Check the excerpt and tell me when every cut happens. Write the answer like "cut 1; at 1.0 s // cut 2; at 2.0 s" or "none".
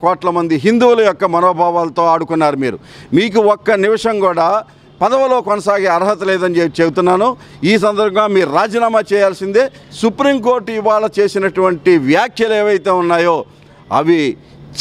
none

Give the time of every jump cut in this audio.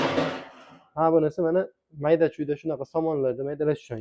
none

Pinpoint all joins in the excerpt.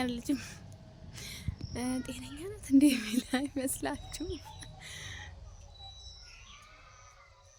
none

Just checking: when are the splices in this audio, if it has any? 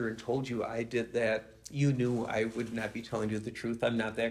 none

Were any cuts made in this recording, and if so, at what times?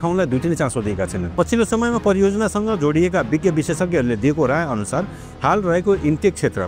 cut 1; at 1.2 s

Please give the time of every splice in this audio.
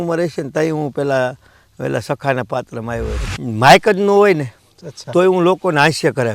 cut 1; at 3.3 s

